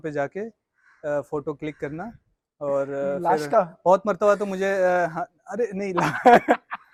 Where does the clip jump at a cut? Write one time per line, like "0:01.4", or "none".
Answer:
none